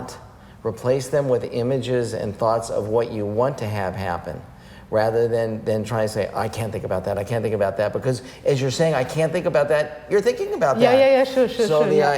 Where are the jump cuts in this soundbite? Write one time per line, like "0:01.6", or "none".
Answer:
none